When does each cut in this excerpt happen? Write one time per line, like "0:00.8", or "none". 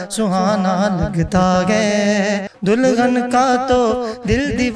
0:02.5